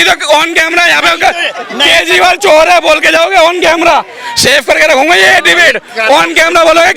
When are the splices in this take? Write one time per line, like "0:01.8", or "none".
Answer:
none

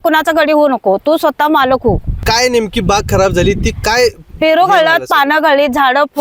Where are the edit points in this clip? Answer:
0:02.1

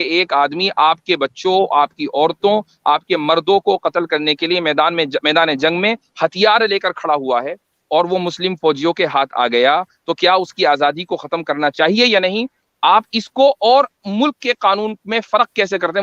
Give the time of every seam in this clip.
none

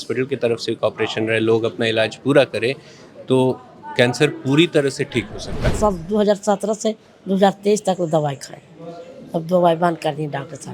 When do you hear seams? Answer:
0:05.7

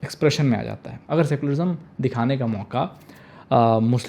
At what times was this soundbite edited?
0:01.0

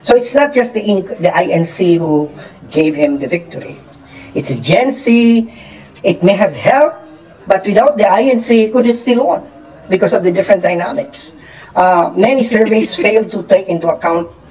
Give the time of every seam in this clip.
none

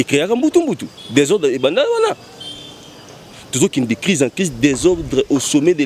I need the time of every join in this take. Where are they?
none

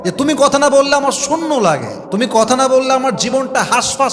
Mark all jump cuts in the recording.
none

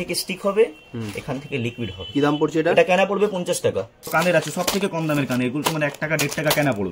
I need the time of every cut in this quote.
0:04.1

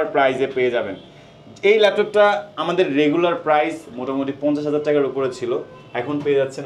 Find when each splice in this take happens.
none

